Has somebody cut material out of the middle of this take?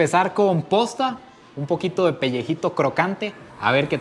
no; 0 cuts

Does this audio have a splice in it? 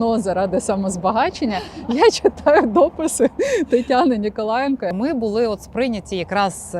yes; 1 cut; at 4.9 s

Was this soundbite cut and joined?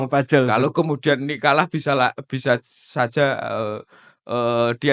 no; 0 cuts

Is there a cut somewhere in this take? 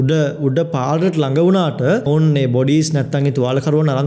yes; 1 cut; at 2.1 s

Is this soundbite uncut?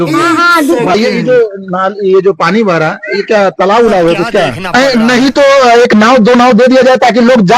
no; 2 cuts; at 0.9 s, 4.7 s

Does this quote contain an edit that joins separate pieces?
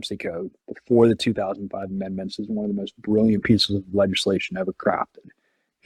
no; 0 cuts

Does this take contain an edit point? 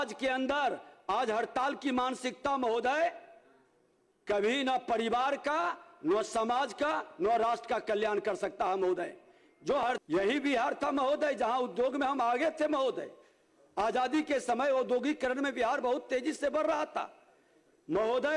yes; 1 cut; at 10.0 s

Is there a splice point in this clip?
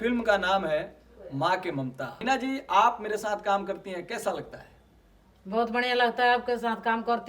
yes; 1 cut; at 2.2 s

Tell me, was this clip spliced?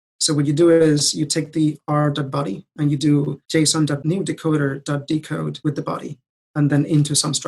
yes; 2 cuts; at 3.8 s, 5.5 s

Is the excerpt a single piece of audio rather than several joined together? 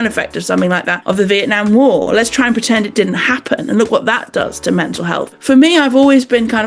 no; 2 cuts; at 0.9 s, 5.2 s

